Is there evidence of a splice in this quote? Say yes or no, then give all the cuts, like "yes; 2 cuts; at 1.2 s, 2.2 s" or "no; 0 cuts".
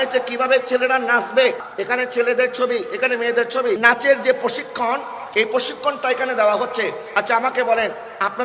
yes; 2 cuts; at 1.6 s, 3.8 s